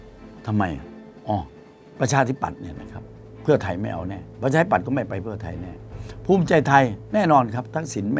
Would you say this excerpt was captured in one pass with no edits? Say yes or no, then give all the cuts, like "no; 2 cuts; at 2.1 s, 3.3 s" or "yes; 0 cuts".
yes; 0 cuts